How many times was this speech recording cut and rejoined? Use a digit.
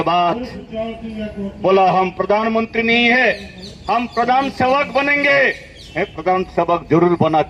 0